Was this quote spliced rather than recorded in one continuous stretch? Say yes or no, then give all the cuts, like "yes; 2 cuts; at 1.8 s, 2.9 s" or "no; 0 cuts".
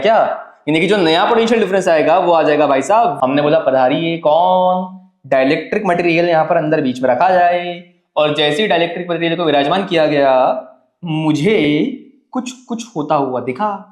yes; 1 cut; at 3.1 s